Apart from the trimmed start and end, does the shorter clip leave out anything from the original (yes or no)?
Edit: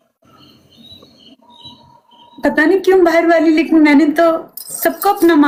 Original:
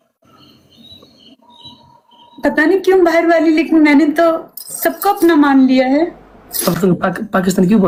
no